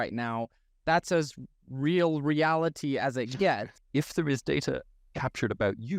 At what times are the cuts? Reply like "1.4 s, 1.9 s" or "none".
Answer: 3.8 s